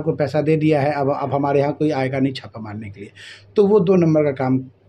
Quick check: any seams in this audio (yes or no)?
no